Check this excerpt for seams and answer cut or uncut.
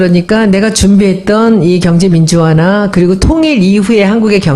cut